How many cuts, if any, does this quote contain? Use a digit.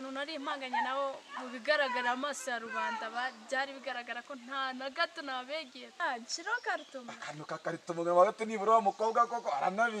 1